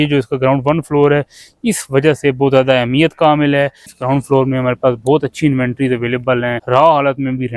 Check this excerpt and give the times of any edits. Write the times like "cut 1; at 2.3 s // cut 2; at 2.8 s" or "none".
cut 1; at 3.9 s // cut 2; at 6.6 s